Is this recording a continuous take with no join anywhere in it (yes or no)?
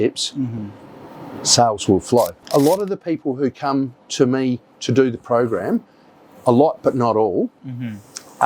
no